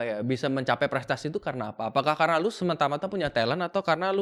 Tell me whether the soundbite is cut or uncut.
uncut